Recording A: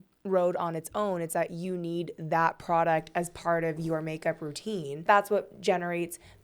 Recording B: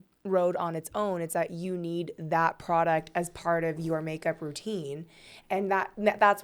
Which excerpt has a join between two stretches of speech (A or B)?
A